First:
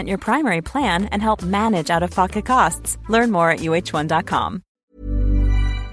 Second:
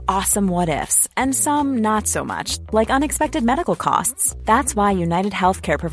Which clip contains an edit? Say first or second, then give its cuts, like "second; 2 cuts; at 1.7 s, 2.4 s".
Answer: first; 1 cut; at 4.7 s